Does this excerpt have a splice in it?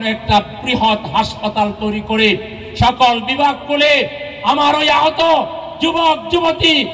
no; 0 cuts

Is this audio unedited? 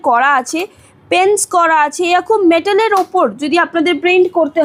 yes; 0 cuts

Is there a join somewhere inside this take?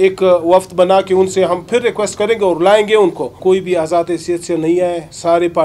yes; 1 cut; at 3.4 s

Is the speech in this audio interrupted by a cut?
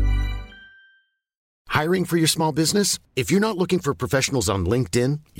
yes; 1 cut; at 1.5 s

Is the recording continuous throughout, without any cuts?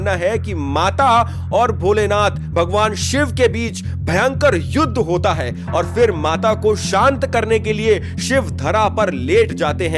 yes; 0 cuts

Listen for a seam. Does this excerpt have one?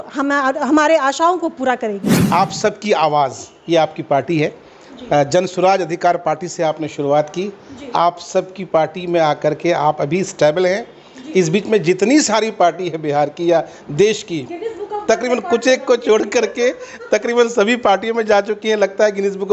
yes; 1 cut; at 2.1 s

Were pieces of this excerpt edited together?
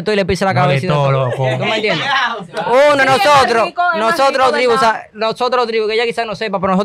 no; 0 cuts

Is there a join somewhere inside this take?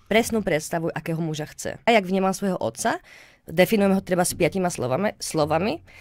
yes; 1 cut; at 1.9 s

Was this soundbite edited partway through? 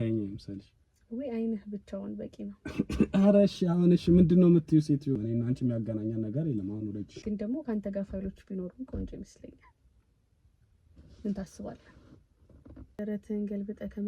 yes; 1 cut; at 5.1 s

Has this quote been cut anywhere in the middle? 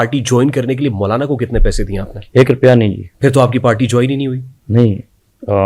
yes; 2 cuts; at 3.1 s, 4.5 s

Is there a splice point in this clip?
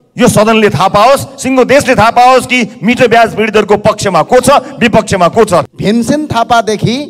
yes; 1 cut; at 5.7 s

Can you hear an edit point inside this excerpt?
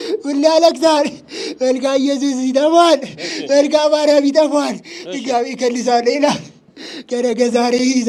no; 0 cuts

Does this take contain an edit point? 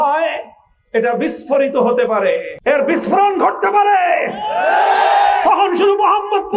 yes; 1 cut; at 2.5 s

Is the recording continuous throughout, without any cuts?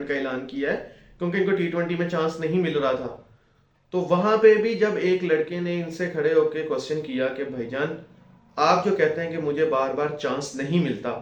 yes; 0 cuts

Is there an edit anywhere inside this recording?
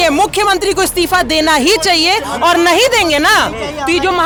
no; 0 cuts

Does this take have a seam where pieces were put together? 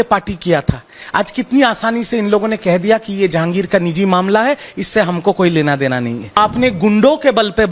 yes; 1 cut; at 6.4 s

